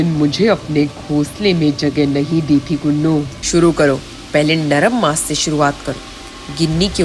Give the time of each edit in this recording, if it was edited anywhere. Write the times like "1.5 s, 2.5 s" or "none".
3.4 s